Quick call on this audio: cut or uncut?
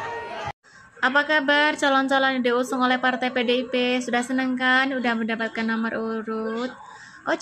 uncut